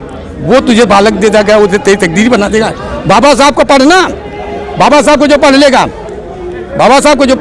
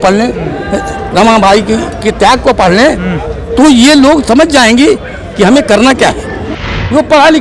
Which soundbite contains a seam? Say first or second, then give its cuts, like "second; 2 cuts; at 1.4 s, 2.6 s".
second; 1 cut; at 6.5 s